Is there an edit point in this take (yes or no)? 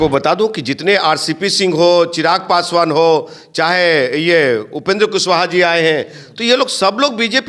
no